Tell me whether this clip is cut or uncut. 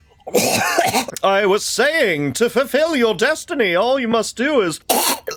uncut